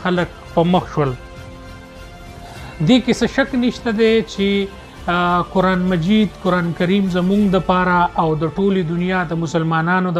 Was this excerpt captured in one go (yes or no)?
yes